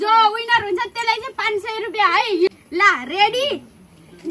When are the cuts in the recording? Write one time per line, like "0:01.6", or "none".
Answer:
0:02.6